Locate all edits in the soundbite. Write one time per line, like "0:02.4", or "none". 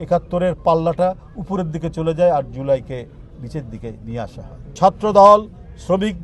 0:04.6